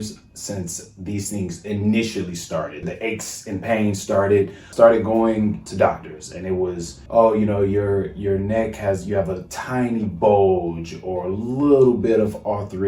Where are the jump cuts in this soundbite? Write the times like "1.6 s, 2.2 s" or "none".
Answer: 2.9 s, 4.6 s, 5.7 s, 6.9 s